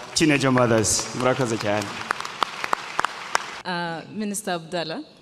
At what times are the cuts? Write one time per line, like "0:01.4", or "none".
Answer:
0:03.5